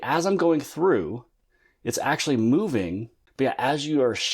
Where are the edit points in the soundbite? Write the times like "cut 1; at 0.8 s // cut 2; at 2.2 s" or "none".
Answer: cut 1; at 3.2 s